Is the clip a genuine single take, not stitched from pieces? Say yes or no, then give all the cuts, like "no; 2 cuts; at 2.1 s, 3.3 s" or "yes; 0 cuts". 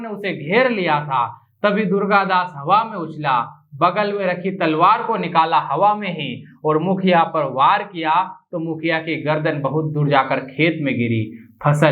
yes; 0 cuts